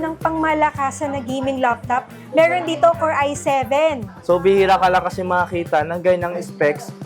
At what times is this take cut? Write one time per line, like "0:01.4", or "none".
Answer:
0:04.1